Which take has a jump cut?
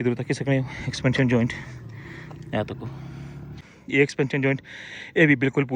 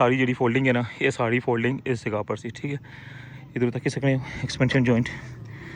first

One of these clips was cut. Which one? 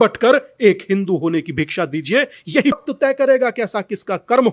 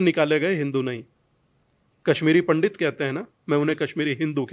first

